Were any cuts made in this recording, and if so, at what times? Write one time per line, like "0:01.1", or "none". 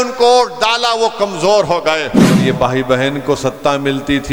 0:02.4